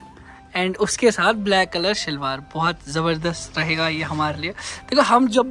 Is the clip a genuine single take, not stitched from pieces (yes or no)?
yes